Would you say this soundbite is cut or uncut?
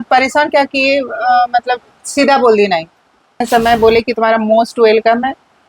cut